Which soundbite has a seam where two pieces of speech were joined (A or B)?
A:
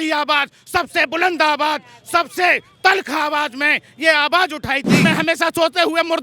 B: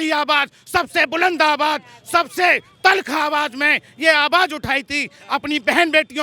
A